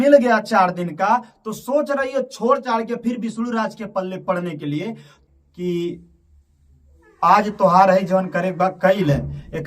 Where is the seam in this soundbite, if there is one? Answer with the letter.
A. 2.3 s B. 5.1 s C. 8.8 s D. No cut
B